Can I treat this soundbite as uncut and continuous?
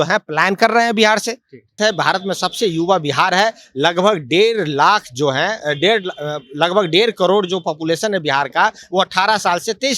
no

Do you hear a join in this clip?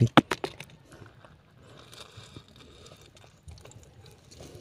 no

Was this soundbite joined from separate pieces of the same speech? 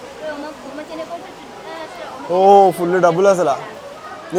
no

